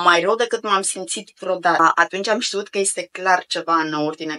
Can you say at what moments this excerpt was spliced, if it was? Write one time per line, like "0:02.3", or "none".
0:01.8